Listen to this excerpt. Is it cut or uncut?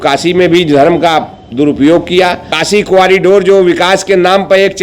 cut